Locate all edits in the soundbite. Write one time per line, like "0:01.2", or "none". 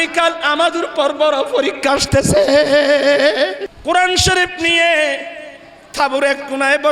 0:03.7

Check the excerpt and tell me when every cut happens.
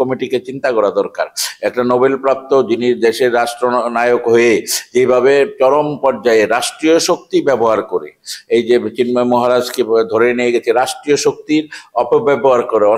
none

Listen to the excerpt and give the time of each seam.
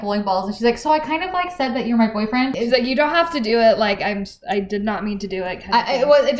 0:02.5

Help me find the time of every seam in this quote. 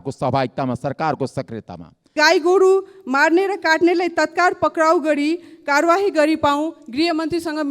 0:02.1

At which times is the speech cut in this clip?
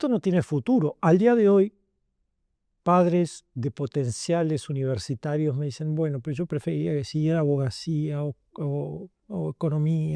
none

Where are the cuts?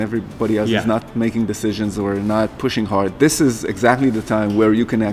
none

